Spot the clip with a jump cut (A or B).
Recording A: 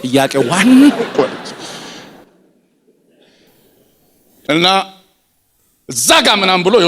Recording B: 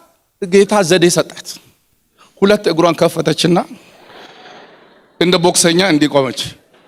A